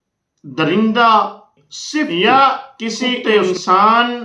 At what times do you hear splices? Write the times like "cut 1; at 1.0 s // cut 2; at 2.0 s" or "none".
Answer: cut 1; at 2.1 s